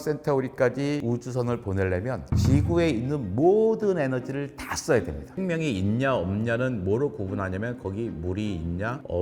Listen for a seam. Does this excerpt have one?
yes; 2 cuts; at 1.0 s, 5.3 s

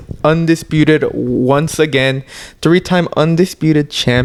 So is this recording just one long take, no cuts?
yes; 0 cuts

